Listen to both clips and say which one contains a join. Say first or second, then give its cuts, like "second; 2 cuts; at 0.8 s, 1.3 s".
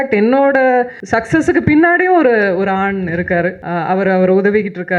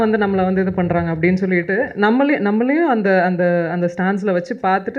first; 2 cuts; at 1.0 s, 3.6 s